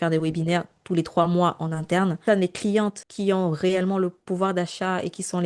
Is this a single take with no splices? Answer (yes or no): no